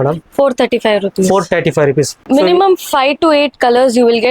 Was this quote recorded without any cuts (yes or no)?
no